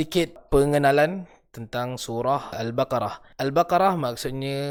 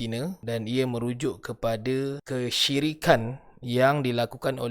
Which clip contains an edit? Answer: second; 1 cut; at 2.2 s

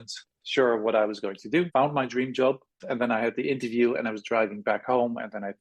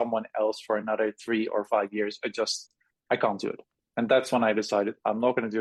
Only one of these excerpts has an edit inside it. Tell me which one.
first; 2 cuts; at 1.7 s, 2.8 s

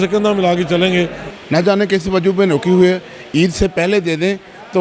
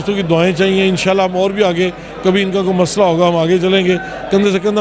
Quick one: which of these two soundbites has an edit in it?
first; 1 cut; at 1.2 s

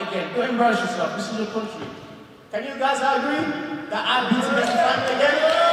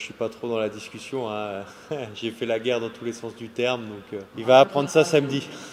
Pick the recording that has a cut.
second; 1 cut; at 4.3 s

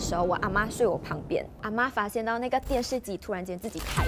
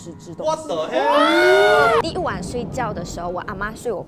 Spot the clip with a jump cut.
second; 1 cut; at 2.0 s

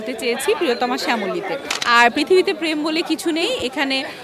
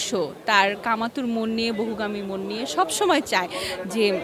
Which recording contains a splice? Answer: first; 1 cut; at 1.7 s

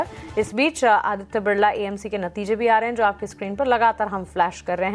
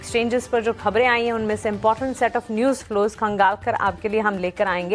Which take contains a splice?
first; 1 cut; at 2.6 s

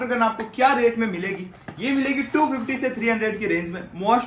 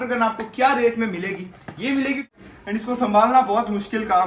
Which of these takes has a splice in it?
second; 1 cut; at 2.3 s

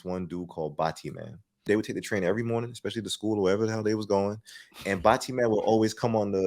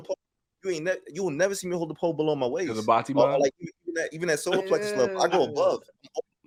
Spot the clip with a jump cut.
first; 1 cut; at 1.7 s

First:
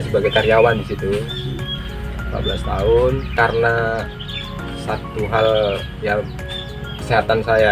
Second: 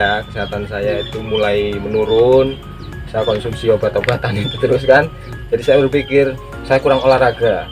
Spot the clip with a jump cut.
first; 2 cuts; at 1.8 s, 3.3 s

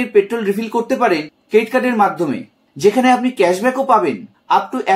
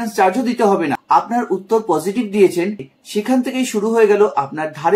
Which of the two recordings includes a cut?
second; 2 cuts; at 1.0 s, 3.0 s

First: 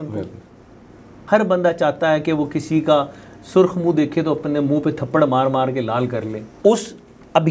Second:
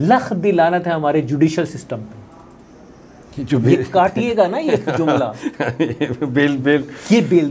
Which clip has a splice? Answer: first; 2 cuts; at 1.2 s, 6.4 s

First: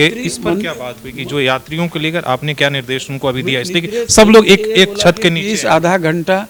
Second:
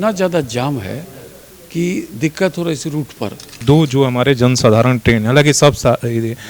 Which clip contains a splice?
second; 1 cut; at 3.6 s

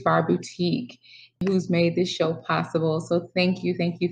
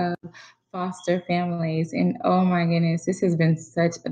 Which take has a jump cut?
first; 1 cut; at 1.4 s

